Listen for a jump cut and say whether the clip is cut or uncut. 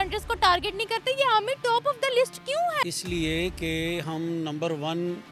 uncut